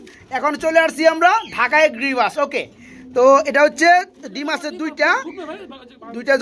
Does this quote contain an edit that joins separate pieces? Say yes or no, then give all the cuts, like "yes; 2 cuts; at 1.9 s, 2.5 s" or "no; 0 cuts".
no; 0 cuts